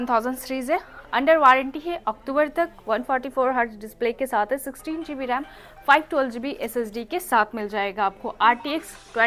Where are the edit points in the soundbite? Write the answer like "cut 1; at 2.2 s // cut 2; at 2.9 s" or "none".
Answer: none